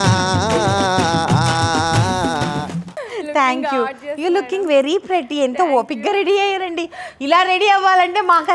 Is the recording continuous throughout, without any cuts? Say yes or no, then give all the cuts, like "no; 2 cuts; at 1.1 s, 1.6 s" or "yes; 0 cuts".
yes; 0 cuts